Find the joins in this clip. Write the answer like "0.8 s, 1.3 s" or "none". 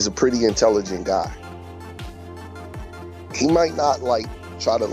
1.3 s, 2.8 s